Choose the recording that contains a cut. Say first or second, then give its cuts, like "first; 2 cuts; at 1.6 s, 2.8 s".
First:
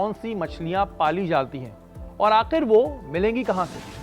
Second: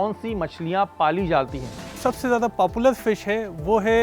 second; 1 cut; at 1.9 s